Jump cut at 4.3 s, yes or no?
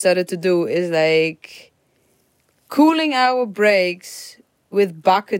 no